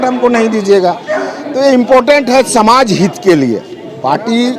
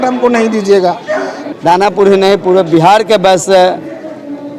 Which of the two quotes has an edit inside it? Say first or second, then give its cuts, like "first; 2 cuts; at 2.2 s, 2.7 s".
second; 1 cut; at 1.4 s